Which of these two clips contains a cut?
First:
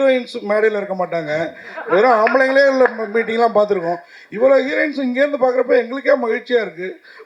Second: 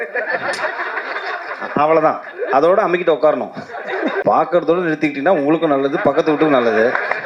second; 1 cut; at 4.2 s

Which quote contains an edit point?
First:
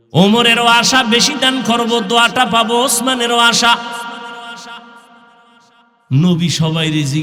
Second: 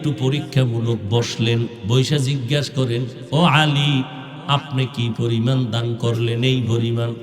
second; 1 cut; at 1.8 s

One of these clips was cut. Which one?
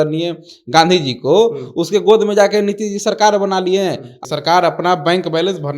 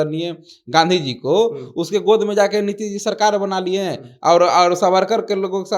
first; 1 cut; at 4.2 s

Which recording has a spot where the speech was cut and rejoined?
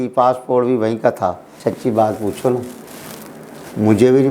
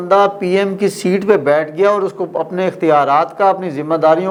first; 1 cut; at 1.5 s

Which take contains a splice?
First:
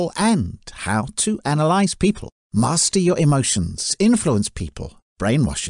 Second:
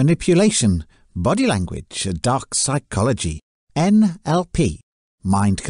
first; 1 cut; at 2.3 s

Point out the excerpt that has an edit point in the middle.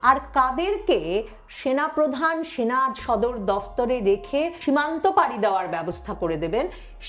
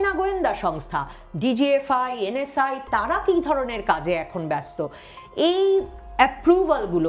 first; 1 cut; at 4.6 s

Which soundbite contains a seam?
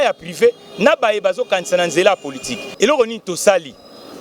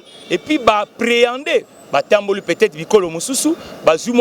first; 1 cut; at 2.6 s

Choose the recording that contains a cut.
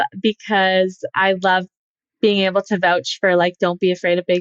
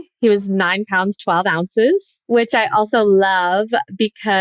second; 1 cut; at 2.2 s

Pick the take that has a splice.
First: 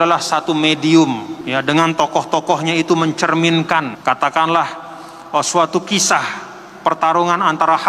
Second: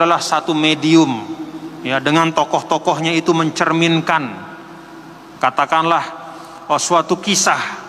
first; 2 cuts; at 1.3 s, 3.9 s

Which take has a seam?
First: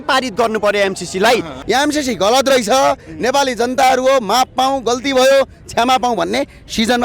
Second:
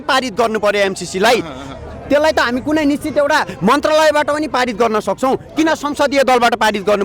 first; 1 cut; at 1.5 s

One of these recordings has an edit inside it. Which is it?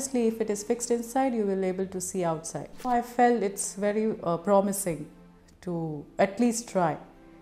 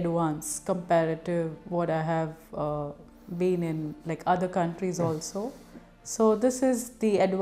first; 1 cut; at 2.9 s

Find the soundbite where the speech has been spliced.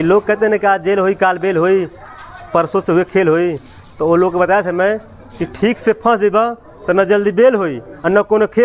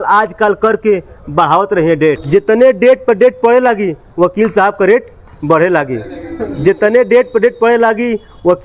second; 1 cut; at 2.2 s

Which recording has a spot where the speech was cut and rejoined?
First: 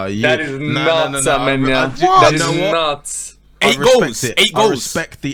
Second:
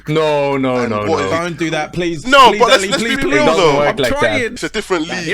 second; 2 cuts; at 3.2 s, 4.5 s

